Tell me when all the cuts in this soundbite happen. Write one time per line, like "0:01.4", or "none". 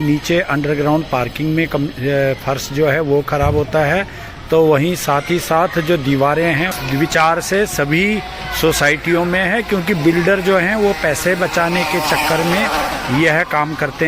0:06.7